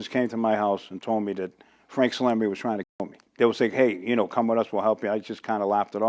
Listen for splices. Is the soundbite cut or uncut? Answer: uncut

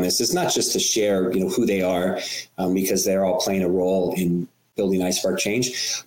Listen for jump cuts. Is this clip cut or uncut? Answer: uncut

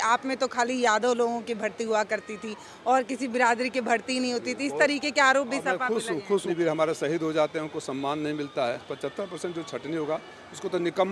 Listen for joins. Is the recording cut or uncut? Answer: cut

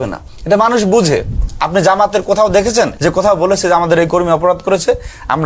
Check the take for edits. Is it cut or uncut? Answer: cut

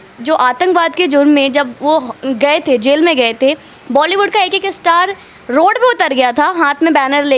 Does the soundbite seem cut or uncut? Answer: uncut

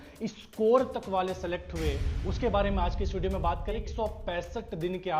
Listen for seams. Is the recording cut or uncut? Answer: cut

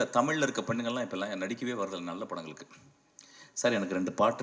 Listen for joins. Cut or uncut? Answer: uncut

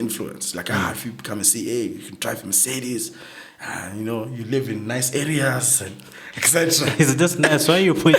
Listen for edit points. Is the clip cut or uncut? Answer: uncut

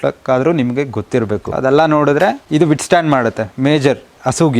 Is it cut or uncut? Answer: cut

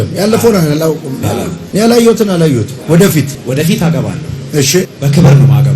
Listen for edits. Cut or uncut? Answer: cut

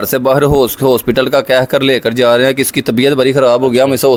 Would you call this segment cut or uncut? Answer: uncut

